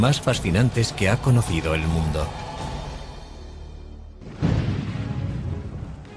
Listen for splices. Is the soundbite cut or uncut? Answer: uncut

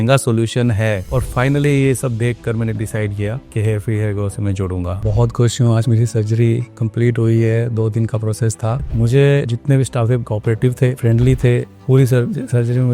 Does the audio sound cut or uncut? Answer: cut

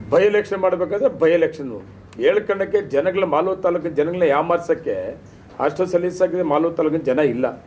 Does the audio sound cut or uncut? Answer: uncut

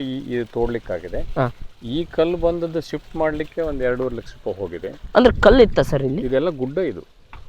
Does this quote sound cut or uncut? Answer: uncut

